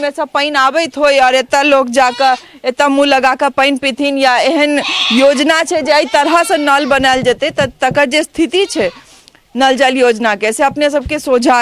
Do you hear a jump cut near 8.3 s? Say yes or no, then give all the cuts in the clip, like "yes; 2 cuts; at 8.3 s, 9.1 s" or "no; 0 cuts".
no; 0 cuts